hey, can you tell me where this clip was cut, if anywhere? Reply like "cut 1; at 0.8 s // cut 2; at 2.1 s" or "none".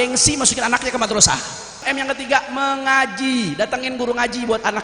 cut 1; at 1.9 s